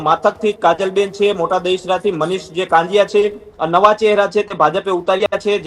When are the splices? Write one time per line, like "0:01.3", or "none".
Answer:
0:03.5